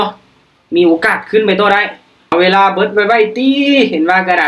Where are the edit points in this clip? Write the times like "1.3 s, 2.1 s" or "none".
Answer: 2.3 s